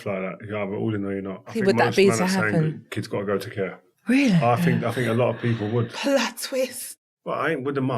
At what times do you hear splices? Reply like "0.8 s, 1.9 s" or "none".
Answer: 1.5 s, 3.9 s, 4.9 s, 6.9 s